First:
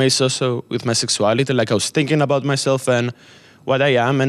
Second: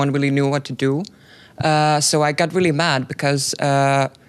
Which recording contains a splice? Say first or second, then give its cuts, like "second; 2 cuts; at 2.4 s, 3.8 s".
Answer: first; 1 cut; at 2.6 s